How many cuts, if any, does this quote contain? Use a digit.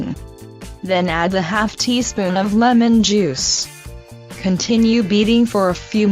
1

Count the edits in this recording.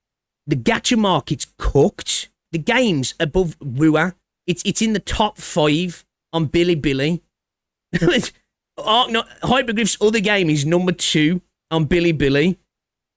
2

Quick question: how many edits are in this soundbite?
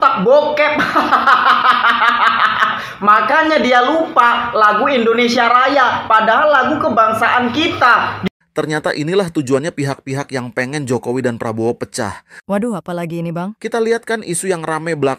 1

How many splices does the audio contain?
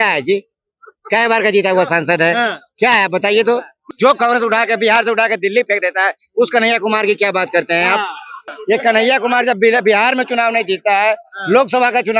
2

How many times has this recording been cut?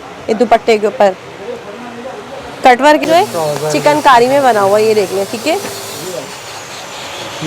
1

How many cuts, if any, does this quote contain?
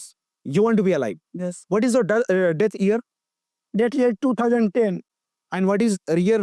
0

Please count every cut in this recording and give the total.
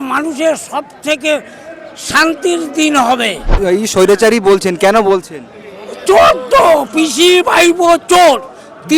1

